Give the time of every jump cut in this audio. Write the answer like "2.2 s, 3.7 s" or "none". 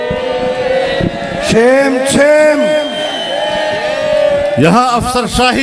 none